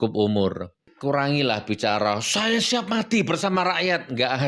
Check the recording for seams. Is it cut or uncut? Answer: cut